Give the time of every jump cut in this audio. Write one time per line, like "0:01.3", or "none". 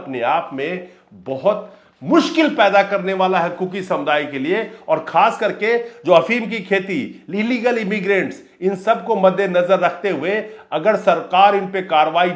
none